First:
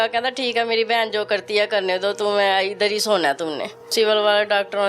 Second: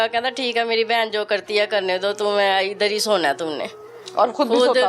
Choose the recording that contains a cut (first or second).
first